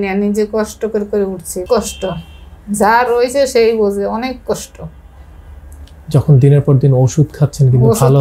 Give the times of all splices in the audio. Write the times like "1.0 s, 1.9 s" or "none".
1.6 s